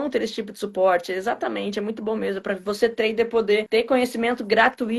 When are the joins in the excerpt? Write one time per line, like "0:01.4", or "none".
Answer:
none